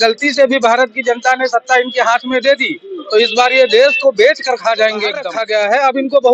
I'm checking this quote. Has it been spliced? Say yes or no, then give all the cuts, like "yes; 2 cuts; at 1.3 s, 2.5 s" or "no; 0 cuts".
yes; 1 cut; at 5.3 s